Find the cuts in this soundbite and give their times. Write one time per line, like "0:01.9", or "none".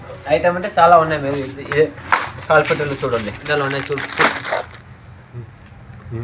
0:03.4